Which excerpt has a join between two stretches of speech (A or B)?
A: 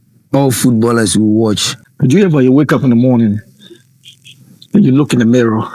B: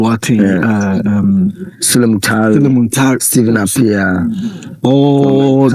A